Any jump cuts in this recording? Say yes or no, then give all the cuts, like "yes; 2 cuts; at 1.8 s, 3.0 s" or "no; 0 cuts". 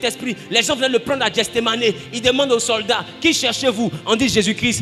no; 0 cuts